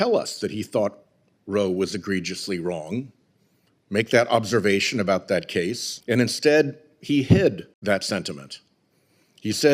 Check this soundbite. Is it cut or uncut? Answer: cut